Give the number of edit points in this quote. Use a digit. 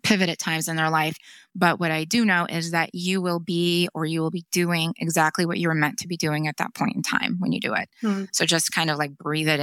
0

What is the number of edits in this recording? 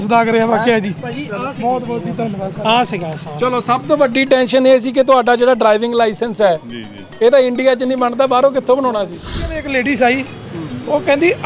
1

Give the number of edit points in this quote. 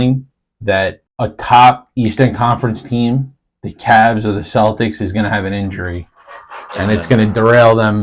1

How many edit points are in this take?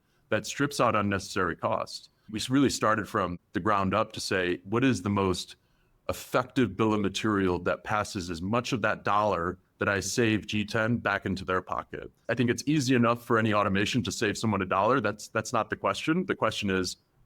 2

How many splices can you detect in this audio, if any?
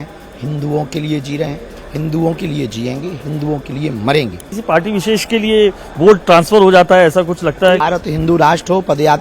2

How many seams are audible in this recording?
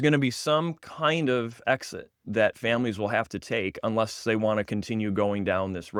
0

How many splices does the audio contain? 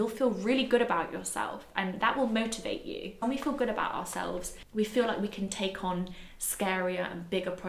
2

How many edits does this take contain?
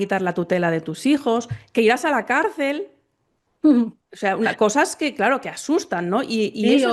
0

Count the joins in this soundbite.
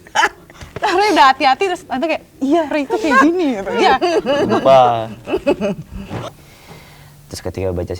1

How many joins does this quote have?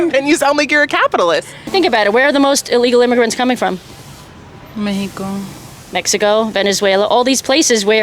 1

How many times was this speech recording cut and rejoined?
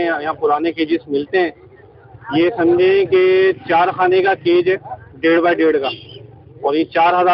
0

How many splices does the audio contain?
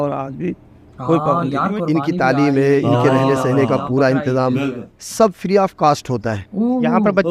1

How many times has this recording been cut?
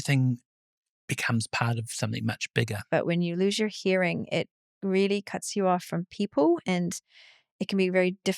1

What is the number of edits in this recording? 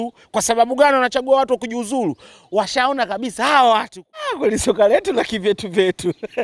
1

